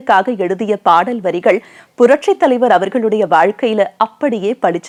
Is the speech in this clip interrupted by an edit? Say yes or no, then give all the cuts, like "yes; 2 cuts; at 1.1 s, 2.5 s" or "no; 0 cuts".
no; 0 cuts